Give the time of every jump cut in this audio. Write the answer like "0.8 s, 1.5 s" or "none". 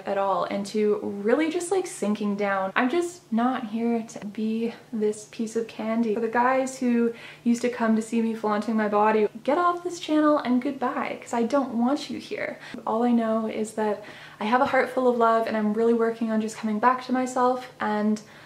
2.7 s, 4.2 s, 6.2 s, 9.3 s, 12.8 s